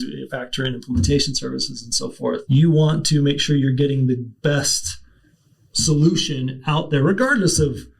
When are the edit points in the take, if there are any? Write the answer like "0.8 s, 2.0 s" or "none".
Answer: 2.4 s